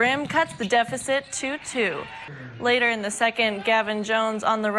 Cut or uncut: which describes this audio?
cut